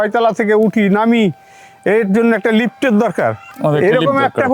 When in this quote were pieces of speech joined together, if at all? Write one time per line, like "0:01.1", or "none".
0:03.5